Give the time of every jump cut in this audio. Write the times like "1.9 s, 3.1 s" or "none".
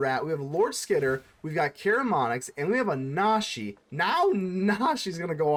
none